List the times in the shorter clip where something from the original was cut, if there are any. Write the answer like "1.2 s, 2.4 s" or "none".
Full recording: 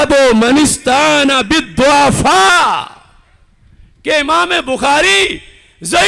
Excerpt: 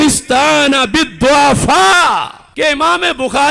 2.4 s